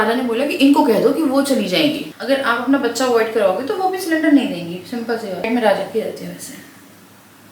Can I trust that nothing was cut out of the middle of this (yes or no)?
no